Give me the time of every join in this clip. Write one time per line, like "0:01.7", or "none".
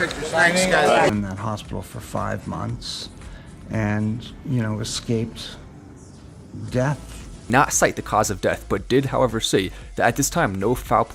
none